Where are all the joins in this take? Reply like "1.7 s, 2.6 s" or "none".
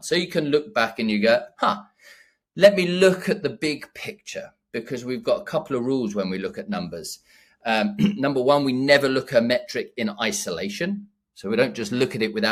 none

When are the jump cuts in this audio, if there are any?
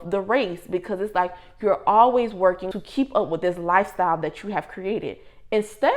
2.7 s

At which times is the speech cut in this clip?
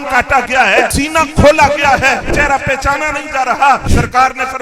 0.9 s, 2.3 s, 3.9 s

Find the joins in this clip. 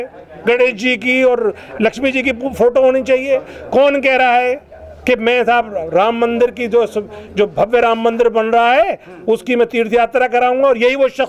none

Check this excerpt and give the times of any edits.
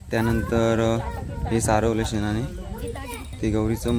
none

